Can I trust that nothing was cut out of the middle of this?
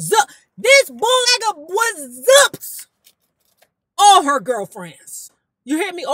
no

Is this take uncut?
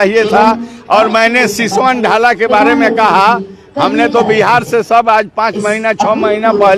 yes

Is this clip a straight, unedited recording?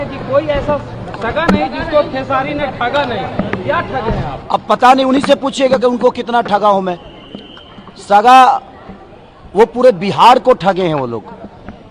yes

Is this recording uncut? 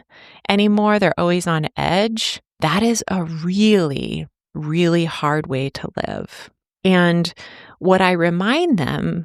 yes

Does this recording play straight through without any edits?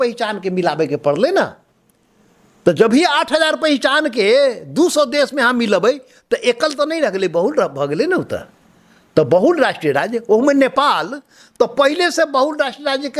yes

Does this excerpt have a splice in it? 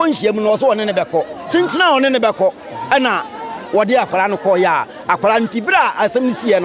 no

